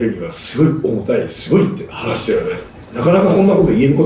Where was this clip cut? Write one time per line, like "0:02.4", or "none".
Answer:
none